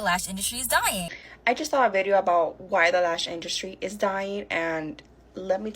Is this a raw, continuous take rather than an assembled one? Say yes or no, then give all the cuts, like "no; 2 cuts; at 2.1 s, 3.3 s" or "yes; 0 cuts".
no; 1 cut; at 1.2 s